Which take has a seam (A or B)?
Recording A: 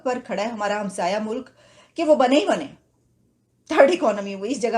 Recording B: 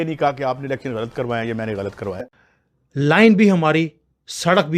B